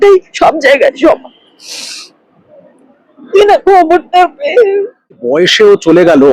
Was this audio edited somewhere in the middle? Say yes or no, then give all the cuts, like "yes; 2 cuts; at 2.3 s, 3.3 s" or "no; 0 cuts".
yes; 1 cut; at 5.2 s